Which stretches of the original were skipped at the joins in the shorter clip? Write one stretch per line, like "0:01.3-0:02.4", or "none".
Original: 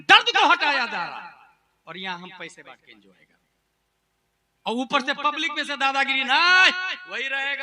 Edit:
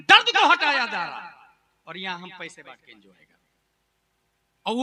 none

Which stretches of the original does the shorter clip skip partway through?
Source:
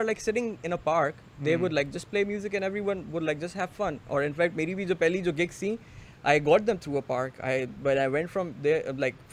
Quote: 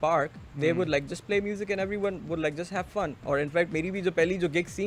none

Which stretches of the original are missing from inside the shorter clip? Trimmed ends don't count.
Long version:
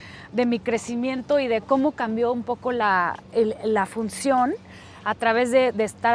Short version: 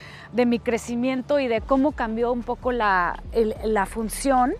none

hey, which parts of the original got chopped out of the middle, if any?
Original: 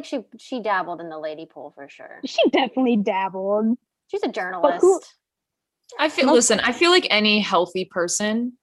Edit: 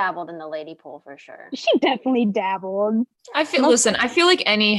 0:03.9-0:05.8

